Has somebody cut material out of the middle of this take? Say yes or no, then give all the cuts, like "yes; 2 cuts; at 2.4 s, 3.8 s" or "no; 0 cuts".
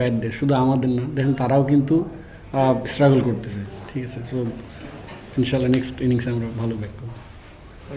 no; 0 cuts